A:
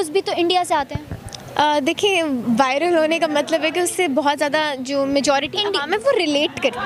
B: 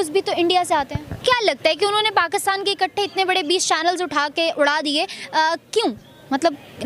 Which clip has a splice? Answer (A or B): B